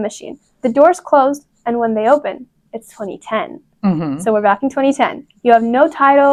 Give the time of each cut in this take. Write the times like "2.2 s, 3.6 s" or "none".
none